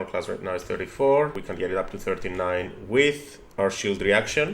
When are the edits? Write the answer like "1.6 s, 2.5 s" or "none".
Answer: 1.4 s

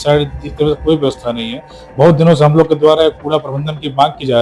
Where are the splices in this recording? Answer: none

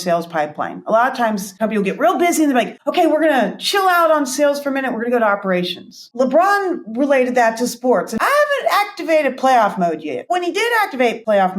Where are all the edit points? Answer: 6.1 s, 8.2 s

